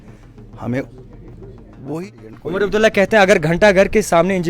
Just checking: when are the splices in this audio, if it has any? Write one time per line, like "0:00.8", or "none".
0:01.9